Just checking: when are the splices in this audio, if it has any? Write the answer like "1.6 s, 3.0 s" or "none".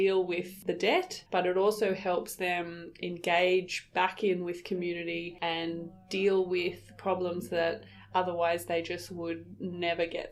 none